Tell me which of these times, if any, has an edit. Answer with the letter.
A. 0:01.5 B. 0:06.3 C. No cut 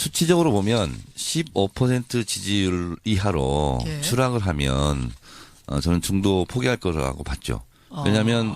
B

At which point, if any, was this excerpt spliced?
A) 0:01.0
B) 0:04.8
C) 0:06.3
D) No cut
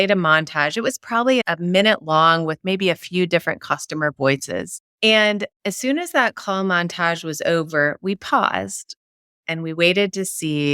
B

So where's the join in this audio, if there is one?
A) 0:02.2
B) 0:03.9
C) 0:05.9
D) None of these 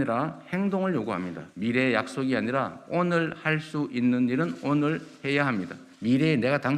C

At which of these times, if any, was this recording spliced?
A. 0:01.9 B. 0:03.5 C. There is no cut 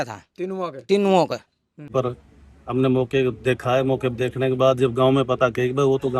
A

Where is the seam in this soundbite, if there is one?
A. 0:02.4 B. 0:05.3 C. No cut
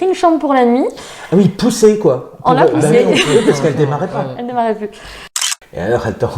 B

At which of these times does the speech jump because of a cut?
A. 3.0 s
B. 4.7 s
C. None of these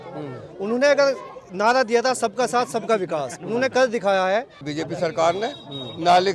B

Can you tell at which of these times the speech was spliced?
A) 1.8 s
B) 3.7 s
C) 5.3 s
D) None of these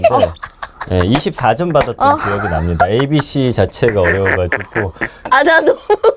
C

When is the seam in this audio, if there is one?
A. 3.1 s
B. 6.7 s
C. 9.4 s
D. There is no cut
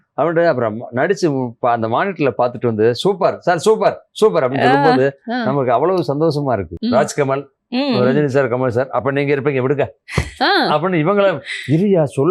B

